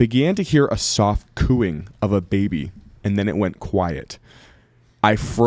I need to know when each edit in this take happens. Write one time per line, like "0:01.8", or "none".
none